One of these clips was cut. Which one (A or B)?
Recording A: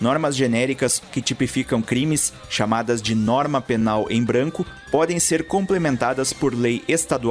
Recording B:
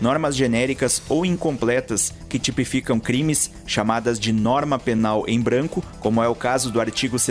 A